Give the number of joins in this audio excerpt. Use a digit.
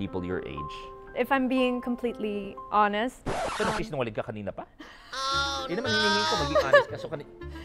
1